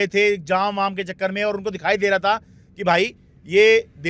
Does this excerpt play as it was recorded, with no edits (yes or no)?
yes